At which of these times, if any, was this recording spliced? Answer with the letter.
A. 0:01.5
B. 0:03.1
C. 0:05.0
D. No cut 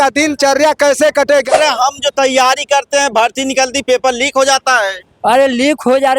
A